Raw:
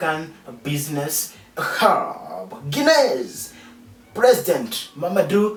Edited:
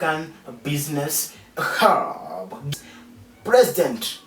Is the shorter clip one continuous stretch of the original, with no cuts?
no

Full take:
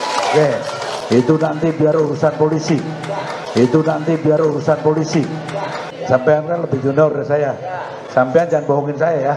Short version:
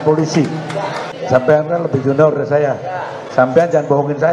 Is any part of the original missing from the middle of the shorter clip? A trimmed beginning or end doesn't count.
yes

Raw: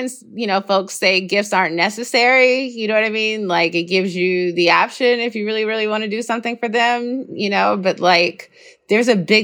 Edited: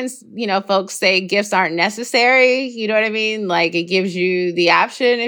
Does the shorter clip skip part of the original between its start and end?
no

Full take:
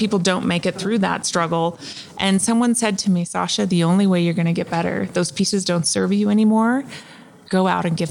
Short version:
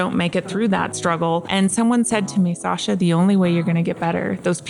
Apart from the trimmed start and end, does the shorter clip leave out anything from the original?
yes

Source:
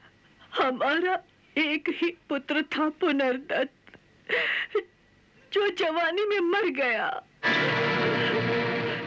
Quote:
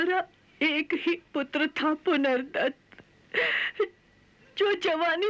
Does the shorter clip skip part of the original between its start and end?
no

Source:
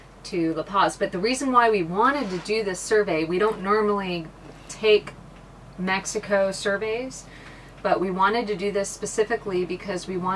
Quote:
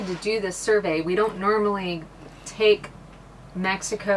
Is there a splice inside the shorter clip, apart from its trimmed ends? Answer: no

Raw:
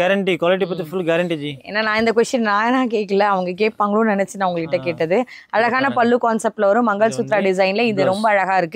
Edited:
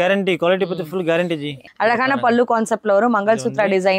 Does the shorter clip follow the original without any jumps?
no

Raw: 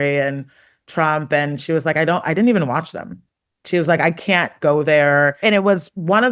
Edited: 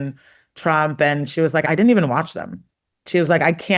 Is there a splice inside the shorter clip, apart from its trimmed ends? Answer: yes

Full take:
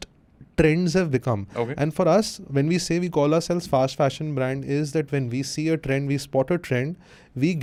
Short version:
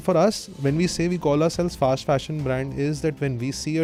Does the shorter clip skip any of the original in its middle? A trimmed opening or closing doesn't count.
no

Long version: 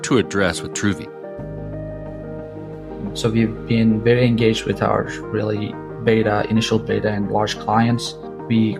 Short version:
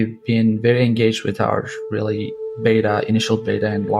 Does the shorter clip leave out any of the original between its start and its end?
no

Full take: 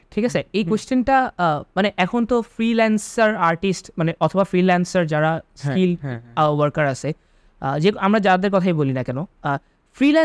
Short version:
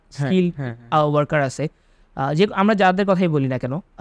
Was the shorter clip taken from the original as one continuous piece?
yes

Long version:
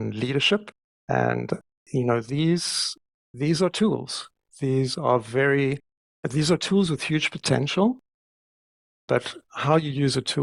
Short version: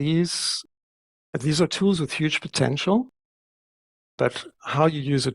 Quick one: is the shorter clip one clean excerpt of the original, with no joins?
no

